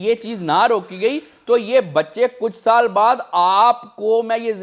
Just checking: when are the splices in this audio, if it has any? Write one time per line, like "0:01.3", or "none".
none